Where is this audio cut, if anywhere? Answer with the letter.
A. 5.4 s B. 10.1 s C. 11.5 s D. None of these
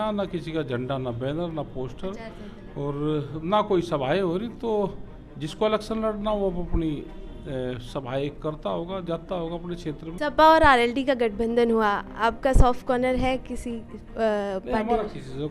B